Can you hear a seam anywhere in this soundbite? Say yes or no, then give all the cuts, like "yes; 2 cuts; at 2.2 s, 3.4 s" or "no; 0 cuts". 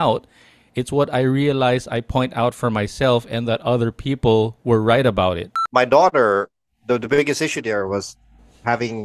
yes; 1 cut; at 5.5 s